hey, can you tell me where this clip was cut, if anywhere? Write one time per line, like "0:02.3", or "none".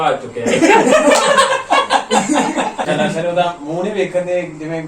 0:02.8